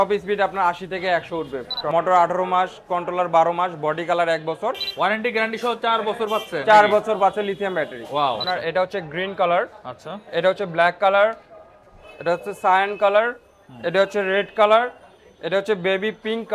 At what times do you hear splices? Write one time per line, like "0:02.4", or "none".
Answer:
0:01.9
0:04.9
0:08.4